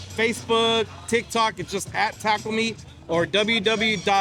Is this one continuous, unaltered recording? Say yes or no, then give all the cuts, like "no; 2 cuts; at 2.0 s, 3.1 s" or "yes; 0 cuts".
yes; 0 cuts